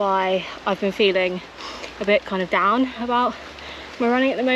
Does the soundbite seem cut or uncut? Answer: uncut